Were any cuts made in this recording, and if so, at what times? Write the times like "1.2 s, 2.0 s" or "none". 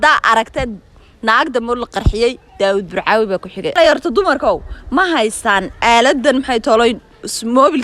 3.8 s